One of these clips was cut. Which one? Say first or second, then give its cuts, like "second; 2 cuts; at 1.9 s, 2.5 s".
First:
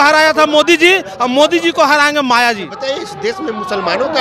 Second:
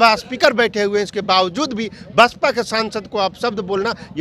first; 1 cut; at 2.7 s